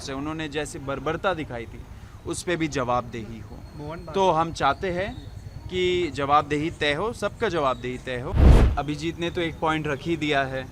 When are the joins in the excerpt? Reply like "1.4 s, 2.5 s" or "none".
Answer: 8.4 s